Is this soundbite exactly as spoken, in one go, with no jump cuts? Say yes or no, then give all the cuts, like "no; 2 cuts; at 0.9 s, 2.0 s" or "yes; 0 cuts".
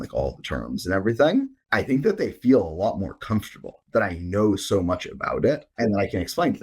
no; 2 cuts; at 1.6 s, 5.7 s